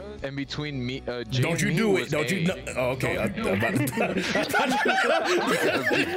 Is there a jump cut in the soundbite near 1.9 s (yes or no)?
no